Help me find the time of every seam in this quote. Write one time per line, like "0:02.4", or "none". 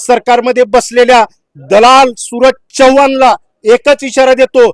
none